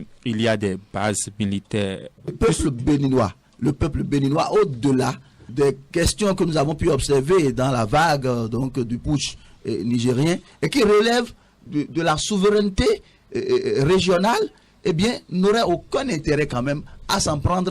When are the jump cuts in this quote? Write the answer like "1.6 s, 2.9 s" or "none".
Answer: 2.3 s